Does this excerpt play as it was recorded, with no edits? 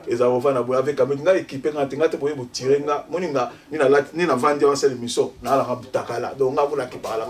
yes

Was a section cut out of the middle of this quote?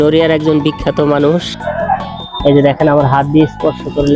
yes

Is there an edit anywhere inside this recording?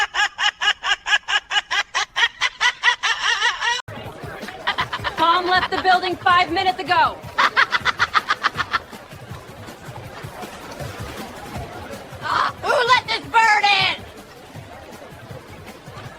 no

